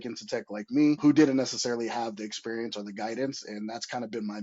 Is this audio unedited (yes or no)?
no